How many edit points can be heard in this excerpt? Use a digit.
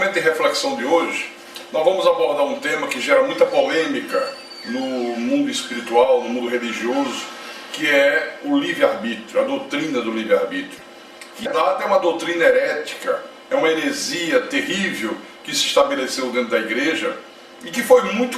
1